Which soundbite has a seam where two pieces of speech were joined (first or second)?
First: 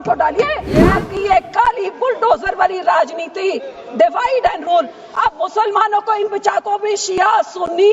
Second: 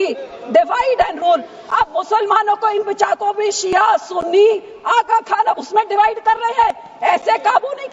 first